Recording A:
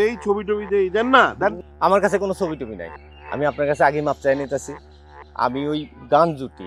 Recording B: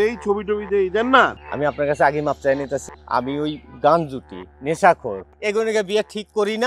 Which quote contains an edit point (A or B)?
B